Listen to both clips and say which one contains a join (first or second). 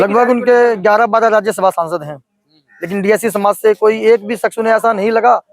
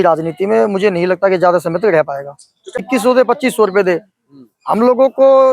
second